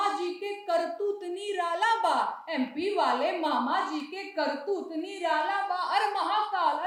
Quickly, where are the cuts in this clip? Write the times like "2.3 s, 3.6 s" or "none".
none